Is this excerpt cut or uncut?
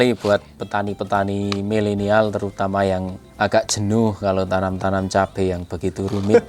uncut